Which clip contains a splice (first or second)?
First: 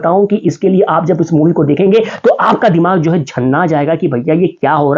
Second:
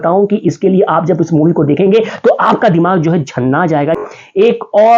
second